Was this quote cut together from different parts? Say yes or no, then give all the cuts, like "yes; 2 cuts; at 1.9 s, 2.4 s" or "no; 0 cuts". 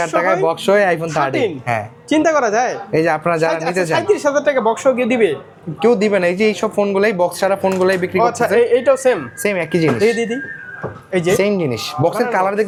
no; 0 cuts